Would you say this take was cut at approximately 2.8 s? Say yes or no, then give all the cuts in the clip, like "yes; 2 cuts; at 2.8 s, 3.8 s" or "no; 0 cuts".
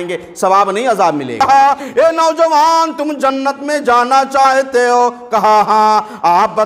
no; 1 cut; at 1.4 s